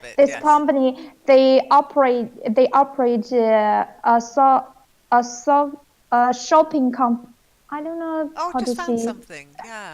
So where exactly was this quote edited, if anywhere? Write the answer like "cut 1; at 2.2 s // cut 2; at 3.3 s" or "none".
cut 1; at 8.8 s